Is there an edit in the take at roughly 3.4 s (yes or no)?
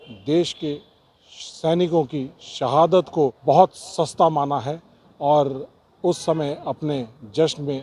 yes